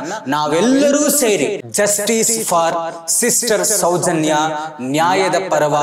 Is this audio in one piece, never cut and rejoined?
no; 1 cut; at 1.6 s

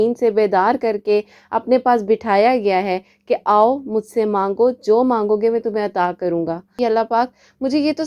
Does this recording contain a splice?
yes; 1 cut; at 6.8 s

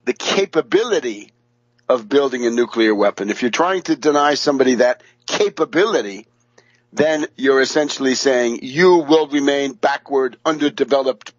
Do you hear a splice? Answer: no; 0 cuts

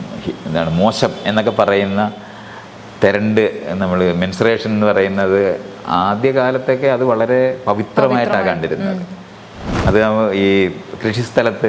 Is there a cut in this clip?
no; 0 cuts

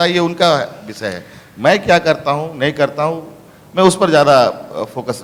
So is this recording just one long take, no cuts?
yes; 0 cuts

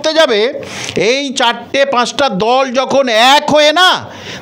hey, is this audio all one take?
yes; 0 cuts

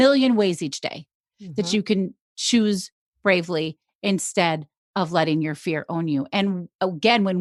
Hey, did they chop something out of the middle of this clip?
no; 0 cuts

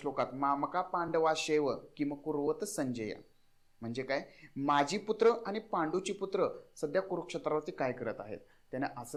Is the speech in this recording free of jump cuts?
yes; 0 cuts

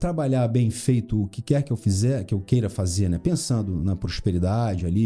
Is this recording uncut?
yes; 0 cuts

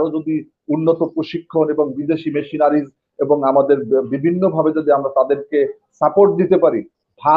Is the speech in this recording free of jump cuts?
yes; 0 cuts

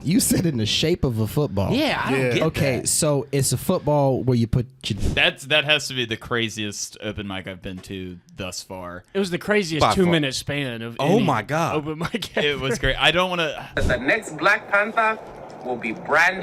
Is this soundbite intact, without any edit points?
no; 2 cuts; at 4.9 s, 13.8 s

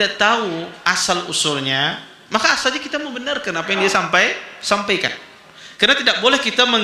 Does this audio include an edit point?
no; 0 cuts

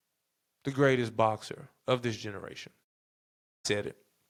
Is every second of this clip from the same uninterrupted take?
yes; 0 cuts

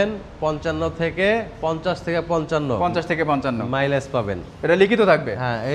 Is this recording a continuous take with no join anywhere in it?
yes; 0 cuts

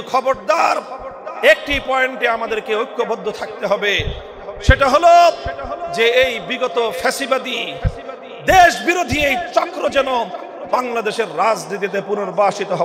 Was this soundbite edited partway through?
no; 0 cuts

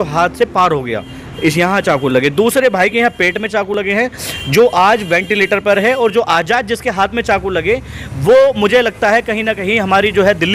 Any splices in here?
no; 0 cuts

